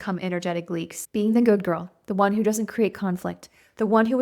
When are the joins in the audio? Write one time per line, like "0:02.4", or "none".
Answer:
0:01.0